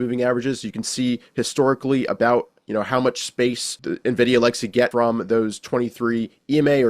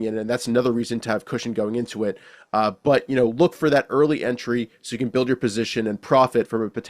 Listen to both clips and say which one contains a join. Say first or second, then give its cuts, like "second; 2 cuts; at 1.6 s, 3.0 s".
first; 2 cuts; at 3.7 s, 4.9 s